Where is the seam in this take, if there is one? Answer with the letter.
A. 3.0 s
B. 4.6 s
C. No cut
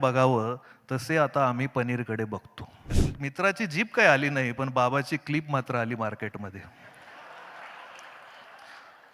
A